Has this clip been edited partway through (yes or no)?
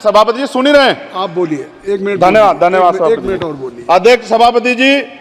no